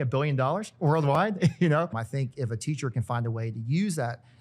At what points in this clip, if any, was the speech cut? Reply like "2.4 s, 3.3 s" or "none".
1.9 s